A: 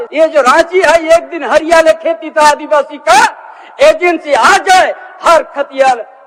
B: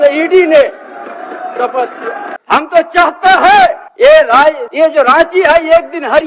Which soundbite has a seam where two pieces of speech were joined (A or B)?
B